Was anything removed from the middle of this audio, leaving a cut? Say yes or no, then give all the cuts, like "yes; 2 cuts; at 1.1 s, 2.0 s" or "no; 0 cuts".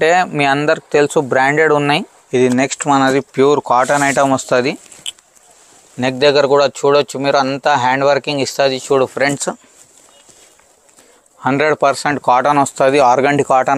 yes; 1 cut; at 2.2 s